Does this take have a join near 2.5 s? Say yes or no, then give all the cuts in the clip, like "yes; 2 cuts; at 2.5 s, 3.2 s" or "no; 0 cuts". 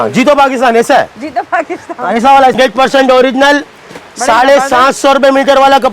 yes; 1 cut; at 2.5 s